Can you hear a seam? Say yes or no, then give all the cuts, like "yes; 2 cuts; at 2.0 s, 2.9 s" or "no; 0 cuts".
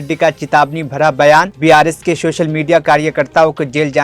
no; 0 cuts